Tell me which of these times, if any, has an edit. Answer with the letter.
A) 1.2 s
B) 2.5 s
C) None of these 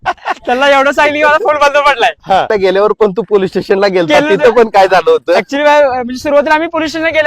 B